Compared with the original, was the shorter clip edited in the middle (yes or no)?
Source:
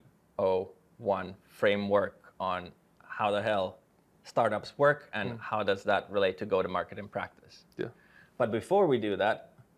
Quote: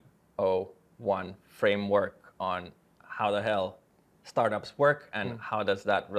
no